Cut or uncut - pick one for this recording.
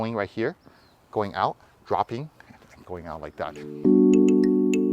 cut